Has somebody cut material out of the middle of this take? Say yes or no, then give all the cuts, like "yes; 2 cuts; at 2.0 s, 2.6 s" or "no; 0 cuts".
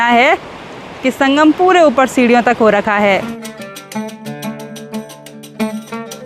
no; 0 cuts